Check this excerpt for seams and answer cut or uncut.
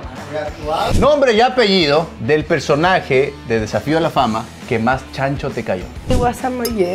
cut